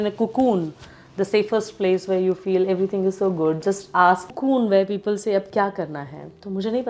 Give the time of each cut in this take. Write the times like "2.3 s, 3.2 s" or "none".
4.3 s